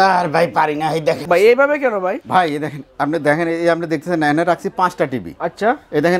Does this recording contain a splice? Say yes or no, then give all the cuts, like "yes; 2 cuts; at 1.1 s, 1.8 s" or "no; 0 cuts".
no; 0 cuts